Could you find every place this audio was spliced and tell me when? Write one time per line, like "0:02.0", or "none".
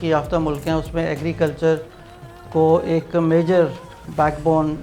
none